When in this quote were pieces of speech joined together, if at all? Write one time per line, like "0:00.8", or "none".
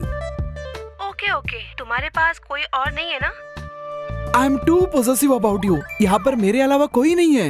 none